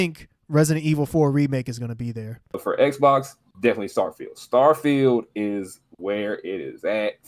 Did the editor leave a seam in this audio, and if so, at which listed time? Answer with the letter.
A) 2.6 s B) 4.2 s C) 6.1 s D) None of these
A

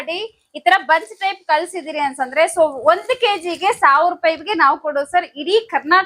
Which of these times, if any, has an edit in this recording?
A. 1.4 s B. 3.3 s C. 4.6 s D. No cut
D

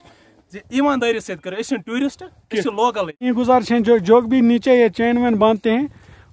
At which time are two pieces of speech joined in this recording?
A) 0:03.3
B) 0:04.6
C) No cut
A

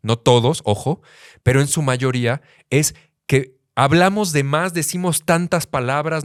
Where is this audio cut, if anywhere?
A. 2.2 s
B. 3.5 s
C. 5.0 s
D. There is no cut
D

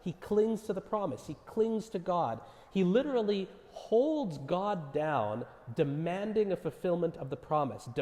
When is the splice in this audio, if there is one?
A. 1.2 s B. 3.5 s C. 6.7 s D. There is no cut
D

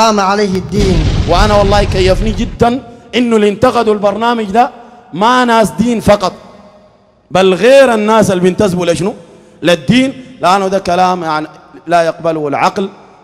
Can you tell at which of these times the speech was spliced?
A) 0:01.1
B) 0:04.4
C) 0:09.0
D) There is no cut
A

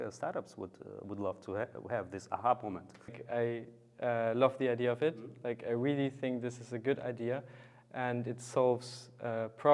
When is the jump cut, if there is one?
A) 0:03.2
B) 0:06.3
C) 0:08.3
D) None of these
A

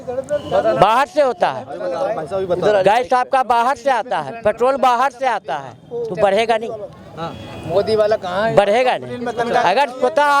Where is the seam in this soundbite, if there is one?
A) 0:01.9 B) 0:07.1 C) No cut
C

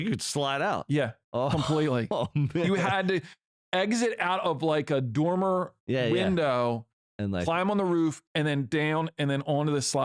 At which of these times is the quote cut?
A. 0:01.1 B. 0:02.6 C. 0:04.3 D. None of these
B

